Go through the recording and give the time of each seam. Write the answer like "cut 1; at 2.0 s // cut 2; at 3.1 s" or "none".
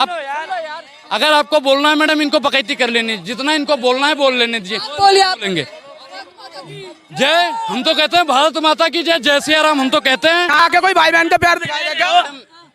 cut 1; at 10.6 s